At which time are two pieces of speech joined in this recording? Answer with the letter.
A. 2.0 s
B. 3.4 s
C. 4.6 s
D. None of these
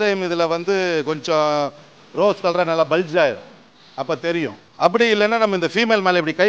C